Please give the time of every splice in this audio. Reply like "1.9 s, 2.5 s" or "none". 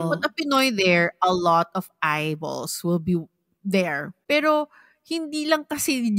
4.1 s